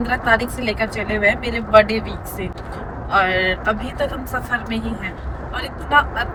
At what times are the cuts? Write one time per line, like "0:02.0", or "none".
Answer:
none